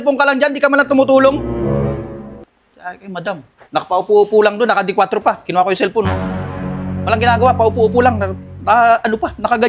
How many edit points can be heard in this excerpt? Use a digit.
1